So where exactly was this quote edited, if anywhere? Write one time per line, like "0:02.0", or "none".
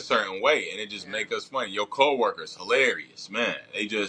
none